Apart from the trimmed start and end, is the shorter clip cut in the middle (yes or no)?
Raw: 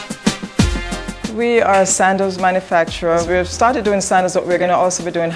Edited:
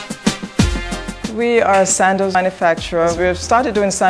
yes